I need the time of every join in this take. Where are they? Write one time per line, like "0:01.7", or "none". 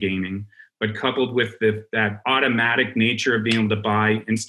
0:02.2